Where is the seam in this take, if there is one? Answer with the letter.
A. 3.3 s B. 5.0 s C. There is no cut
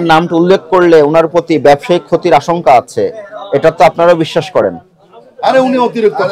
C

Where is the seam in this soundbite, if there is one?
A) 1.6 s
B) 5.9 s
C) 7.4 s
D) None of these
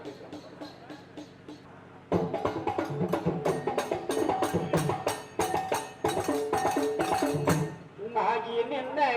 A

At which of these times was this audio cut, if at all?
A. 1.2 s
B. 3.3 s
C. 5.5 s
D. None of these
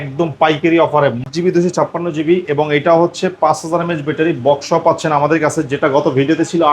A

